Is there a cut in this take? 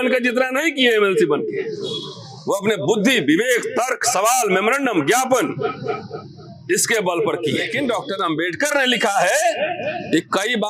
yes; 1 cut; at 7.7 s

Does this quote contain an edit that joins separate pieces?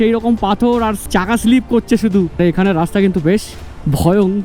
yes; 2 cuts; at 1.0 s, 2.4 s

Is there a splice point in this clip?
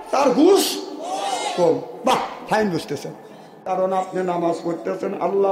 yes; 1 cut; at 3.6 s

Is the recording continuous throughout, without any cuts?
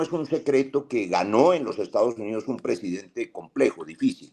yes; 0 cuts

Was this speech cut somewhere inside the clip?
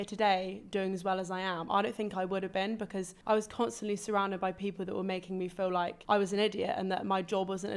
no; 0 cuts

